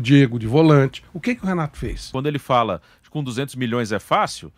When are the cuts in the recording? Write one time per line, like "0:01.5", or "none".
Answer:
0:02.0